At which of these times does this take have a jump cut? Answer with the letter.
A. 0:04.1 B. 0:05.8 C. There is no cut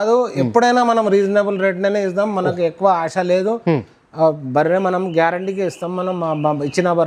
C